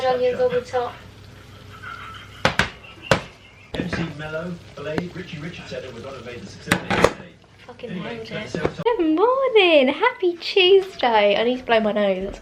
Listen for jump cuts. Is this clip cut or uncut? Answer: uncut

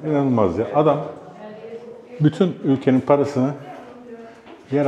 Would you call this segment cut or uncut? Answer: uncut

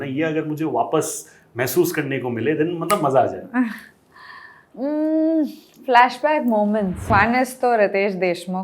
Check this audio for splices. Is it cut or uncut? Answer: cut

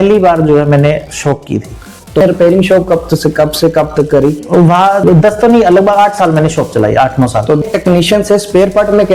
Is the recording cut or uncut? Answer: cut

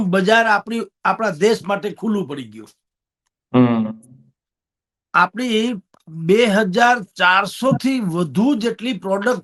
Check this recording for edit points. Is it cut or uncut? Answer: uncut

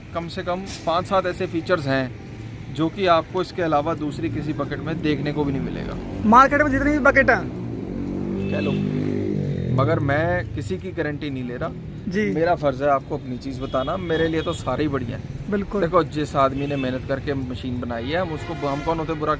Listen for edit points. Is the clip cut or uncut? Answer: uncut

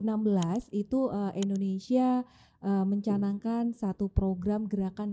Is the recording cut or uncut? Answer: uncut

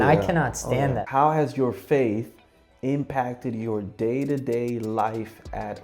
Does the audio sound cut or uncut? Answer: cut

